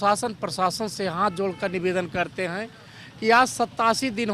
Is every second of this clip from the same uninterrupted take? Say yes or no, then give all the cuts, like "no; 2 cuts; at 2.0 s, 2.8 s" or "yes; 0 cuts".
yes; 0 cuts